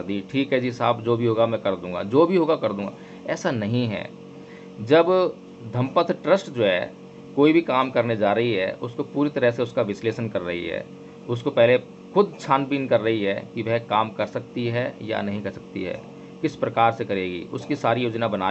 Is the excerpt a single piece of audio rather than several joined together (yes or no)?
yes